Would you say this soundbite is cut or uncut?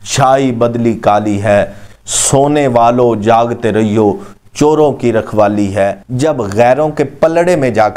cut